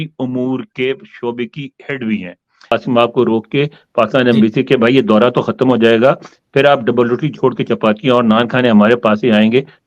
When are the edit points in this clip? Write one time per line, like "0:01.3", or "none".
0:02.7